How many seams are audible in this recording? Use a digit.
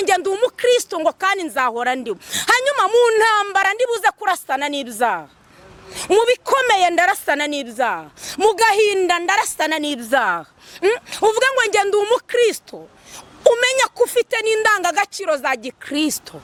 0